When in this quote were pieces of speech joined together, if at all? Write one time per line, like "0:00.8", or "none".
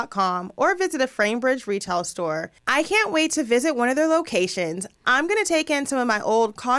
0:02.5